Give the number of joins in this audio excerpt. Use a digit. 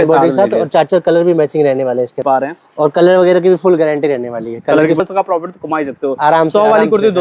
2